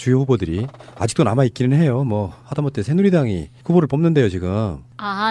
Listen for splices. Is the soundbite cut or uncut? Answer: cut